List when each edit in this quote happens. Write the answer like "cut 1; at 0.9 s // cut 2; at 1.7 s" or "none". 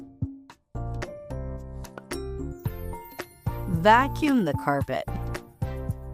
cut 1; at 3.7 s // cut 2; at 5.2 s